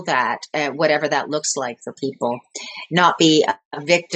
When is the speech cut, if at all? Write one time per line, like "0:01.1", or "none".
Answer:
none